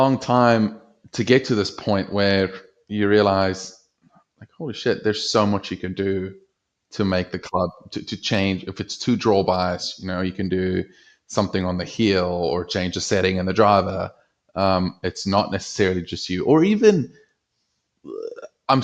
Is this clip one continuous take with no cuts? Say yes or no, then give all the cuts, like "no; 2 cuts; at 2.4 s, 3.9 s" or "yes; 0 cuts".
yes; 0 cuts